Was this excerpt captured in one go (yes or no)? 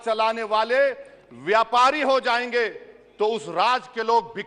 yes